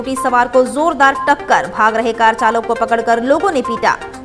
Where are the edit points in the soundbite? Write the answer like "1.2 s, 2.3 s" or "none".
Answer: none